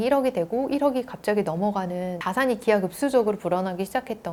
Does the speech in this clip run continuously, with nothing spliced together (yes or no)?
yes